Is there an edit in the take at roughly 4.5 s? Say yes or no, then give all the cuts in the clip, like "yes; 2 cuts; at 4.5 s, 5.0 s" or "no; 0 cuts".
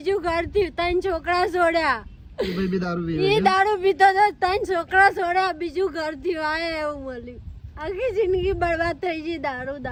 no; 0 cuts